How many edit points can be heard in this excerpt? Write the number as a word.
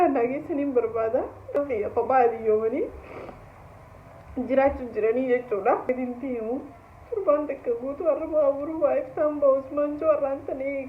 two